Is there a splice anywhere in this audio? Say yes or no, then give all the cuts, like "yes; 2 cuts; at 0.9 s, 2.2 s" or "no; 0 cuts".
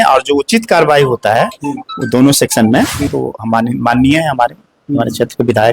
yes; 1 cut; at 3.2 s